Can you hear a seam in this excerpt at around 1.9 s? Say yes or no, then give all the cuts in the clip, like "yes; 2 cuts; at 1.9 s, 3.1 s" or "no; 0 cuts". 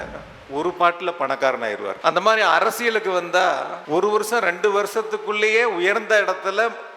yes; 2 cuts; at 1.9 s, 3.8 s